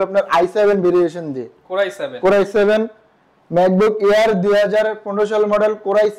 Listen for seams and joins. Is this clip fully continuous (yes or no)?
yes